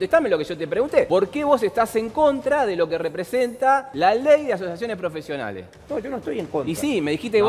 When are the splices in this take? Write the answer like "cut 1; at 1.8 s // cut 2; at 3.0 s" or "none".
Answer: cut 1; at 1.1 s // cut 2; at 3.9 s